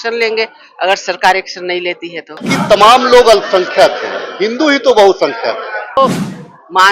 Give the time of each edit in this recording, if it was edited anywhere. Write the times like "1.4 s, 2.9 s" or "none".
2.5 s, 6.0 s